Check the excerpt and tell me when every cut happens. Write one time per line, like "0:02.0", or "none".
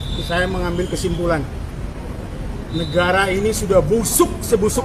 none